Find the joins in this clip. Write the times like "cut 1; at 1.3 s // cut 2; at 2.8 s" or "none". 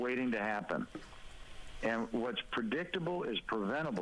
none